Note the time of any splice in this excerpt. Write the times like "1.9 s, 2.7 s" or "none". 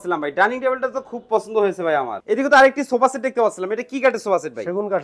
2.2 s